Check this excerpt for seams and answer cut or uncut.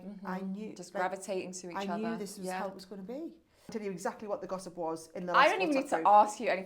cut